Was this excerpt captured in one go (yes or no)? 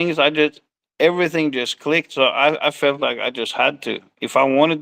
yes